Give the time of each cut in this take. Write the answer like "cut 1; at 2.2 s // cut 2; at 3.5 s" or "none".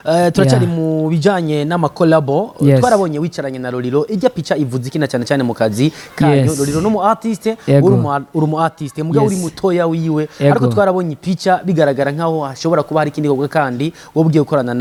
none